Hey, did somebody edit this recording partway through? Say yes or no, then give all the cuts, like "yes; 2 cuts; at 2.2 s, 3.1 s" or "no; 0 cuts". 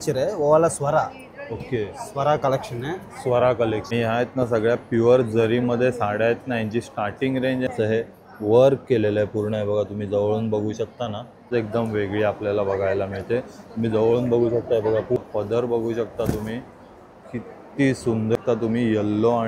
yes; 5 cuts; at 3.8 s, 7.7 s, 11.5 s, 15.2 s, 18.4 s